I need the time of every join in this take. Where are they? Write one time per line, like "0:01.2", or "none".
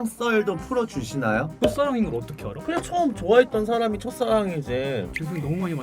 0:01.5